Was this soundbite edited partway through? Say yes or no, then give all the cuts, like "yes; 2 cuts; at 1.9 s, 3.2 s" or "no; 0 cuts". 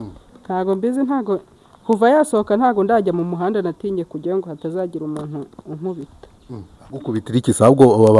no; 0 cuts